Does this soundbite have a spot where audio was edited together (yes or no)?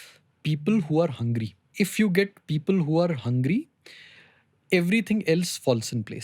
yes